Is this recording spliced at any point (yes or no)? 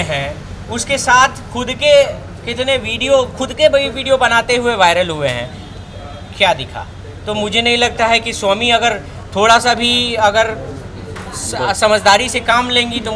no